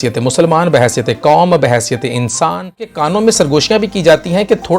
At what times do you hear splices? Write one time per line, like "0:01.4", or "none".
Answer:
0:03.1